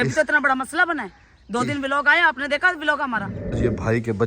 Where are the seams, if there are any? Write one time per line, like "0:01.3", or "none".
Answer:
0:03.4